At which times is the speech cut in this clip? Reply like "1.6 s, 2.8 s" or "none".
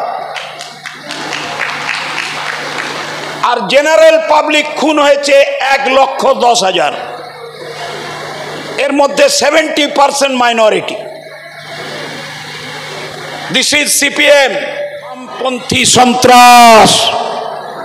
15.3 s